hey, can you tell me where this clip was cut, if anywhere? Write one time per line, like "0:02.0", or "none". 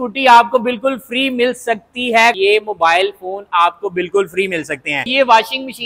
0:02.4
0:05.1